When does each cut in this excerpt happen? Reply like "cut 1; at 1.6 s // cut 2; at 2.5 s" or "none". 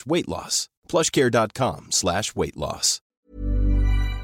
cut 1; at 3.1 s